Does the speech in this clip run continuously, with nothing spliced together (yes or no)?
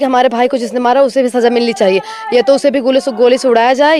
yes